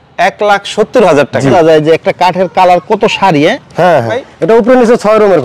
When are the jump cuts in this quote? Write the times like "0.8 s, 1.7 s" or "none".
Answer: 1.5 s, 4.2 s

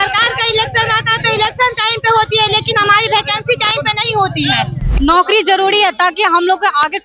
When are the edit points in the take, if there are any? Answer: 4.8 s

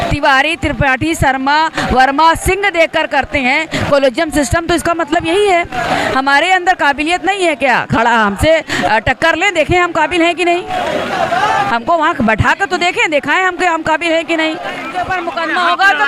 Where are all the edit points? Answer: 14.9 s

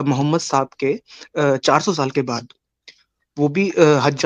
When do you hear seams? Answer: none

